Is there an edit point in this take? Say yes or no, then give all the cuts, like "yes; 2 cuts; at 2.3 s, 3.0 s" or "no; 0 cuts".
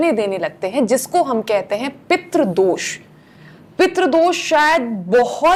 no; 0 cuts